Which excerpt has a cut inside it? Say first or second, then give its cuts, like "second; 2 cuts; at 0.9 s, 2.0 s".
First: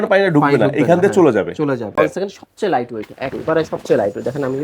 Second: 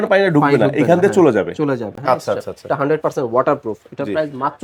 first; 1 cut; at 1.9 s